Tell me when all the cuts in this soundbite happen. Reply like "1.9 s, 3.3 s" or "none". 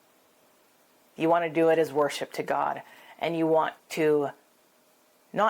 1.0 s